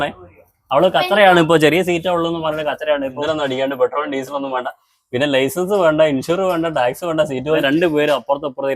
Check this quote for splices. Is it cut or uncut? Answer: cut